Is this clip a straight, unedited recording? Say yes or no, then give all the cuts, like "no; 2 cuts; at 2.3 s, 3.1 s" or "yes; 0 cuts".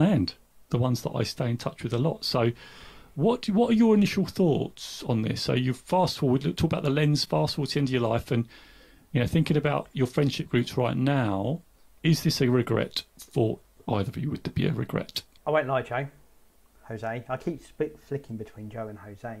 no; 2 cuts; at 13.7 s, 15.2 s